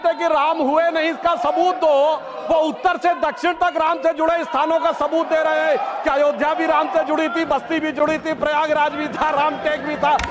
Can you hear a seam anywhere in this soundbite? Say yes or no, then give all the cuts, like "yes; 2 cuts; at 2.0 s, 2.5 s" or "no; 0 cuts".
no; 0 cuts